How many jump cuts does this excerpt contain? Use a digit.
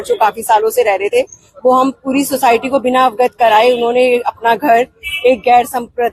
0